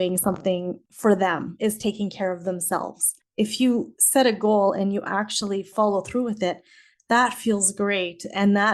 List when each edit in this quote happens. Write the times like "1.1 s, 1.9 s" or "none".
3.2 s, 5.7 s